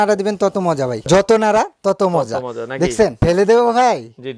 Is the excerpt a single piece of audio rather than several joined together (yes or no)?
no